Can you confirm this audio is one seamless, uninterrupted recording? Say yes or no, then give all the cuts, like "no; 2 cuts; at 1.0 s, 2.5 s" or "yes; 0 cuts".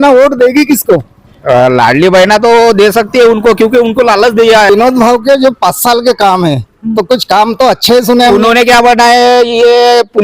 no; 1 cut; at 4.7 s